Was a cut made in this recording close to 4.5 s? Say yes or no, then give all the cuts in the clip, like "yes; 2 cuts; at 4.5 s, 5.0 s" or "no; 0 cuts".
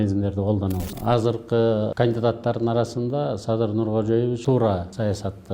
yes; 3 cuts; at 0.8 s, 1.9 s, 4.5 s